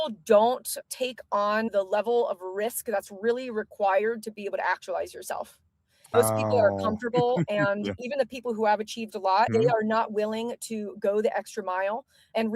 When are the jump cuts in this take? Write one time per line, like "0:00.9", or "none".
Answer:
0:06.1